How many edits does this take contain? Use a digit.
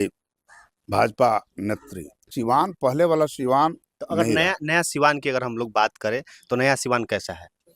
1